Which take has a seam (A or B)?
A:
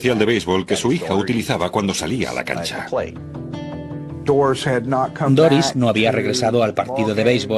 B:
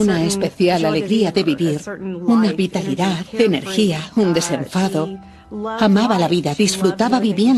B